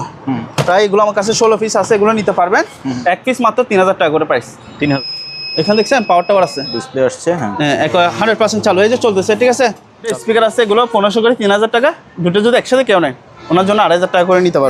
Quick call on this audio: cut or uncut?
cut